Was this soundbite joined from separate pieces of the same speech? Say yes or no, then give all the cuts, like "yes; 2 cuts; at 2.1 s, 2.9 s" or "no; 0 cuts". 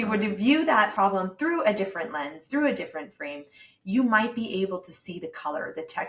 yes; 1 cut; at 0.9 s